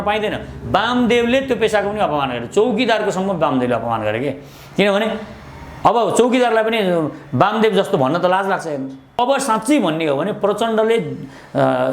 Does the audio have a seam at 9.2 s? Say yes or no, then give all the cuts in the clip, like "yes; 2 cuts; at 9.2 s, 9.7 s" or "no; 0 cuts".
yes; 1 cut; at 9.2 s